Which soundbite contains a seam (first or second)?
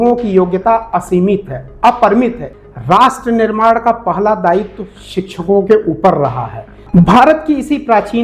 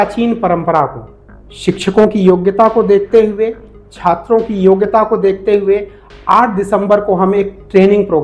first